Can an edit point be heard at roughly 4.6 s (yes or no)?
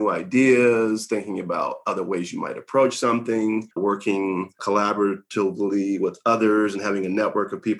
yes